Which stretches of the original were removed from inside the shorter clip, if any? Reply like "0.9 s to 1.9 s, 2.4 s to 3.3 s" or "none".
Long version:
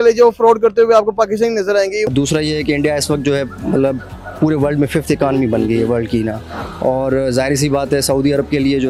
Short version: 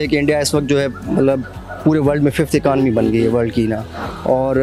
none